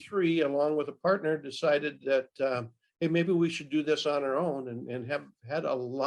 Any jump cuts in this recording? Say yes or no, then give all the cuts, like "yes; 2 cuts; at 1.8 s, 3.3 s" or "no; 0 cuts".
no; 0 cuts